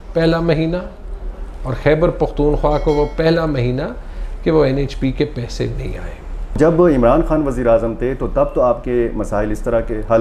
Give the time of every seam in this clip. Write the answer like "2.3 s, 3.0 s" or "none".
6.6 s